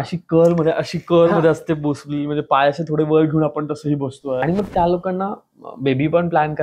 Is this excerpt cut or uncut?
cut